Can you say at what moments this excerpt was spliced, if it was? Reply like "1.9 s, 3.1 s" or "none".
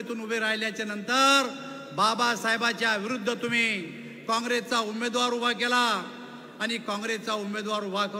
none